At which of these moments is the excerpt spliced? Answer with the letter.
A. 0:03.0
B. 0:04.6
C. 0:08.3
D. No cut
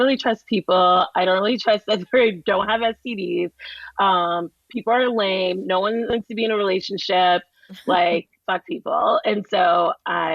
C